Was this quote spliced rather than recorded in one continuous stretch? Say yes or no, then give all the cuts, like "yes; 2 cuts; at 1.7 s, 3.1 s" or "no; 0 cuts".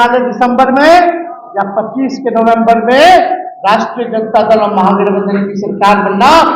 no; 0 cuts